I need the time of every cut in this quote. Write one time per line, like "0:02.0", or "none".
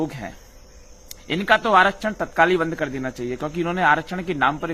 none